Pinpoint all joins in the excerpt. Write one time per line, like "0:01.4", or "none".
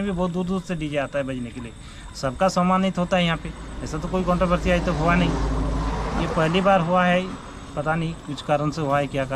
none